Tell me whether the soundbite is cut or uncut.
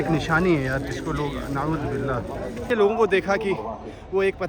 cut